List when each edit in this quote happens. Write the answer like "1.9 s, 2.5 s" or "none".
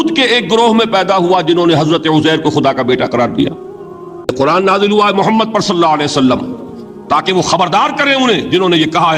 4.3 s